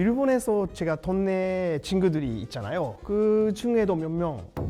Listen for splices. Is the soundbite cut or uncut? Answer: uncut